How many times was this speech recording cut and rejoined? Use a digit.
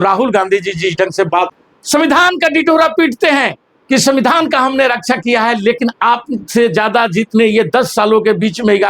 1